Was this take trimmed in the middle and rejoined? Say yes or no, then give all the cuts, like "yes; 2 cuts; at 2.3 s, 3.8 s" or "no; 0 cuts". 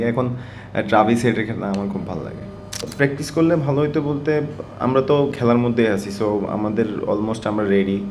yes; 1 cut; at 2.8 s